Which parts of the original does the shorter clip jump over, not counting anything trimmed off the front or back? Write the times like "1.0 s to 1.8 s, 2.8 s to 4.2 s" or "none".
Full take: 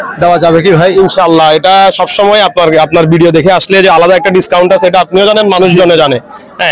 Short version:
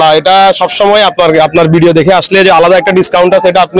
none